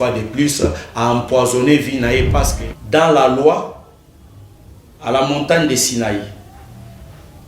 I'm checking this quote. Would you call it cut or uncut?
cut